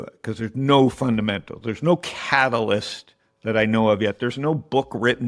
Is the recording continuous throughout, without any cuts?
yes; 0 cuts

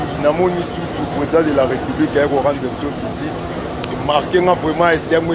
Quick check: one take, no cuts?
yes; 0 cuts

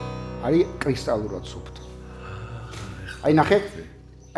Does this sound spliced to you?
no; 0 cuts

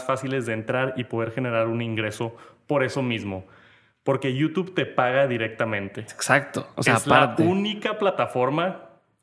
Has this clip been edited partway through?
yes; 1 cut; at 6.2 s

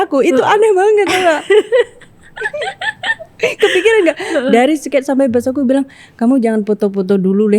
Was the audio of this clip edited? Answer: no; 0 cuts

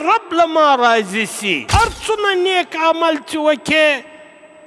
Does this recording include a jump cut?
yes; 1 cut; at 1.6 s

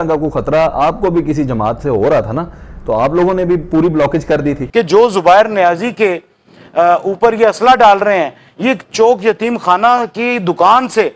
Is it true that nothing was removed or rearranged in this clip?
no; 1 cut; at 4.6 s

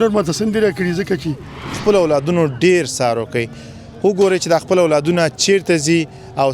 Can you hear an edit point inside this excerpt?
yes; 1 cut; at 1.8 s

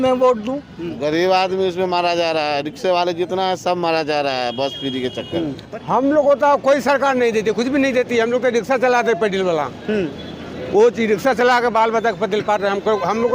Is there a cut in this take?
yes; 2 cuts; at 0.9 s, 5.6 s

